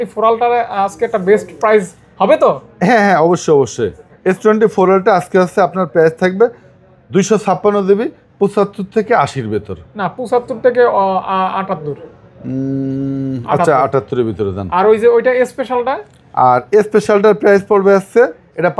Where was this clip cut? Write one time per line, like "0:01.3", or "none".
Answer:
none